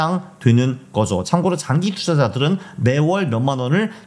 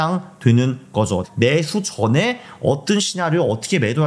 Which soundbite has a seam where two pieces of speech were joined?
second; 1 cut; at 1.2 s

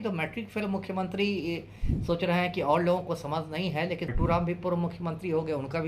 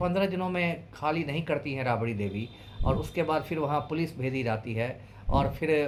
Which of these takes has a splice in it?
first; 1 cut; at 4.1 s

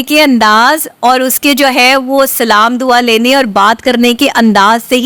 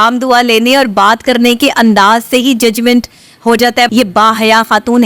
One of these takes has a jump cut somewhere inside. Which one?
second; 1 cut; at 3.9 s

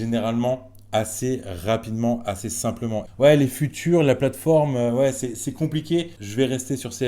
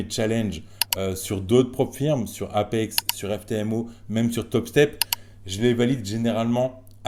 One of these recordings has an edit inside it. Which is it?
first; 2 cuts; at 3.0 s, 6.2 s

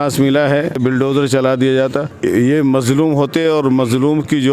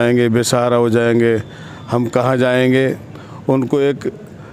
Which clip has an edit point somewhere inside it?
first; 2 cuts; at 0.8 s, 2.1 s

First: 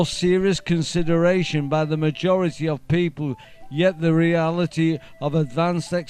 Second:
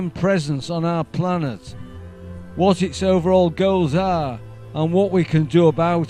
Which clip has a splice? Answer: first; 1 cut; at 3.8 s

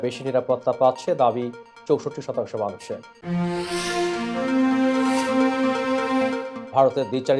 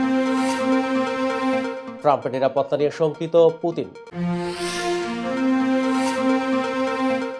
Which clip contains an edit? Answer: second; 1 cut; at 1.8 s

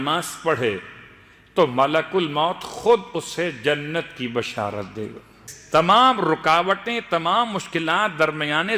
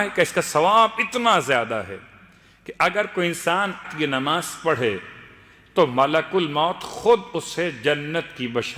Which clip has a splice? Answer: first; 1 cut; at 5.5 s

